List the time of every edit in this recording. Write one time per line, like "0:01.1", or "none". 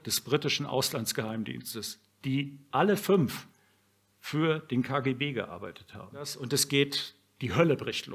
0:06.4